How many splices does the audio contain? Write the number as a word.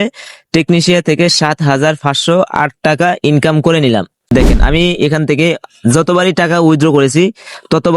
one